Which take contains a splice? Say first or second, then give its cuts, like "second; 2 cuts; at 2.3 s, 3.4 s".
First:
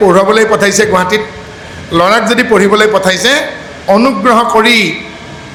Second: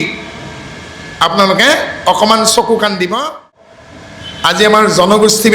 second; 1 cut; at 3.6 s